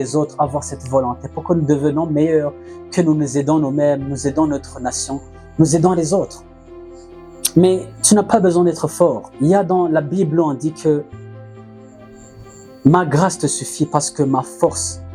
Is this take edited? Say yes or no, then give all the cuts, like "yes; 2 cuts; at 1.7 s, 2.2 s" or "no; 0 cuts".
no; 0 cuts